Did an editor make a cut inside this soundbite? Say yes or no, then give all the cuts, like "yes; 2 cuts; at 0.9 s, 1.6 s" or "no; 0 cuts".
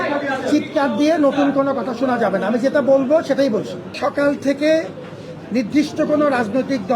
yes; 1 cut; at 3.8 s